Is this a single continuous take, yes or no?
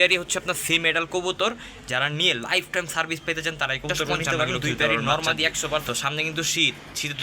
no